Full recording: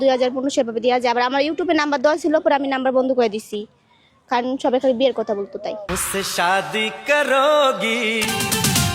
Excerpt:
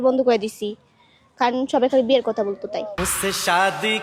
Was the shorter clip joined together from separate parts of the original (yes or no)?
no